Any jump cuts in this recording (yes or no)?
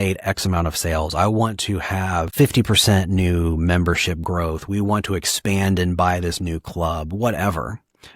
yes